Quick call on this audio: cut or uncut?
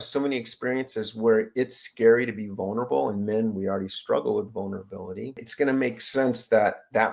cut